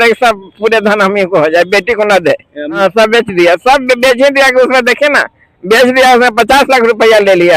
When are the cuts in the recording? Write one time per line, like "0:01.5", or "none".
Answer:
0:02.7